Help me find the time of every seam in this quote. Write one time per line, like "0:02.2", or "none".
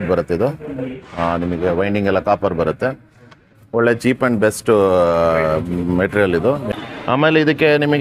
0:06.7